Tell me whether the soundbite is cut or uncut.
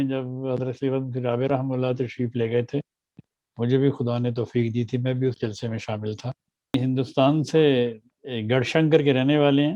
cut